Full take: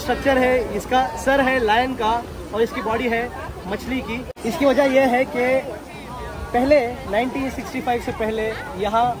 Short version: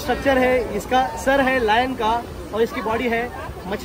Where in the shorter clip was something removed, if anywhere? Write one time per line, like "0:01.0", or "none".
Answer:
none